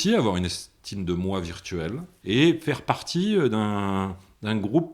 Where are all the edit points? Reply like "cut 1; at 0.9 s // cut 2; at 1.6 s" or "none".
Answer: cut 1; at 2.1 s

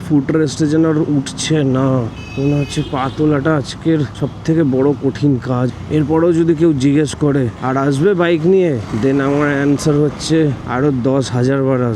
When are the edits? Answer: cut 1; at 2.2 s // cut 2; at 4.2 s // cut 3; at 5.7 s // cut 4; at 7.6 s // cut 5; at 8.9 s // cut 6; at 10.6 s

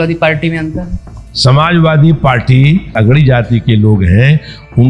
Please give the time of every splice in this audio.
cut 1; at 1.2 s // cut 2; at 3.0 s

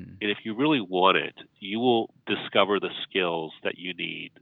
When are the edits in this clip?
cut 1; at 2.2 s

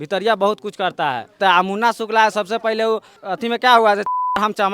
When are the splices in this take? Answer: cut 1; at 1.4 s // cut 2; at 3.2 s

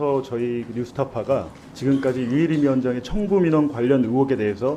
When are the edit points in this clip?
none

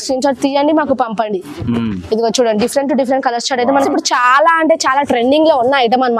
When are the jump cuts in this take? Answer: cut 1; at 3.9 s

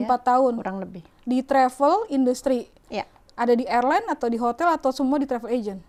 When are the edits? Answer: none

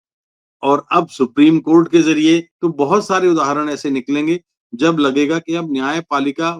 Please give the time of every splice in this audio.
cut 1; at 2.5 s

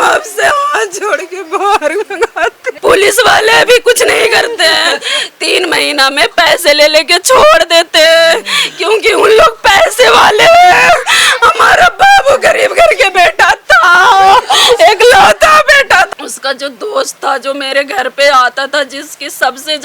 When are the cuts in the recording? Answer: cut 1; at 2.7 s // cut 2; at 16.1 s

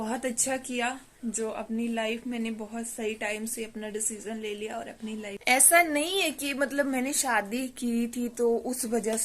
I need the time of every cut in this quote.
cut 1; at 5.3 s

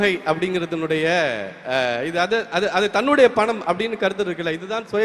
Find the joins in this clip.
none

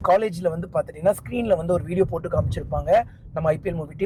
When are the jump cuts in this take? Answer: none

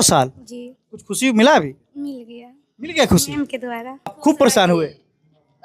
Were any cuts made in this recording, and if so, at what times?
cut 1; at 4.2 s

